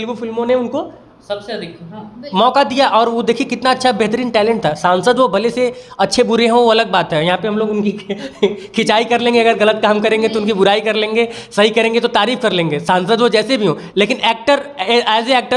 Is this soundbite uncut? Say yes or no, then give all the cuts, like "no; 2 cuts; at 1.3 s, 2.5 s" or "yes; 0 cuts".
yes; 0 cuts